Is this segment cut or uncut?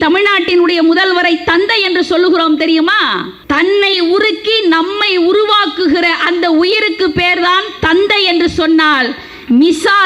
cut